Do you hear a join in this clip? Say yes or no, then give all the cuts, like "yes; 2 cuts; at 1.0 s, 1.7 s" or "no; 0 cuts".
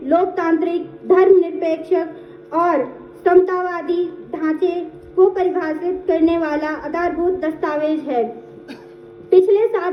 no; 0 cuts